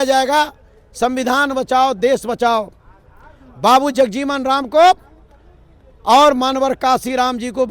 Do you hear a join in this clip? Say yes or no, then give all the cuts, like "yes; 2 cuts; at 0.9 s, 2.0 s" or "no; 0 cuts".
no; 0 cuts